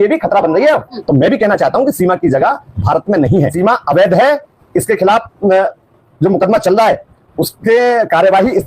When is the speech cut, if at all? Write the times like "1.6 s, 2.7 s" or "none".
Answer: 0.9 s, 3.5 s